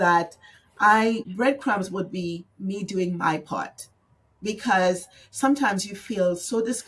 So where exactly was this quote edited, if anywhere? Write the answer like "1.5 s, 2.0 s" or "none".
1.3 s